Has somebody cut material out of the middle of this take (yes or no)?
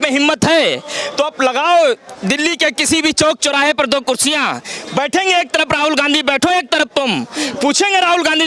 no